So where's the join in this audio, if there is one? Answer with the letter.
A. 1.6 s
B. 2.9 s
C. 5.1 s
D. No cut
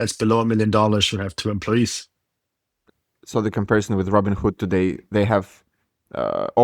B